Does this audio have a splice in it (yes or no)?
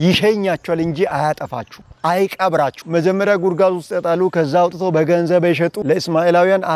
yes